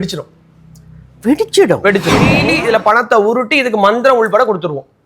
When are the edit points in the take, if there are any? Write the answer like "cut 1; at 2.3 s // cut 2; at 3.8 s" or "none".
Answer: cut 1; at 2.4 s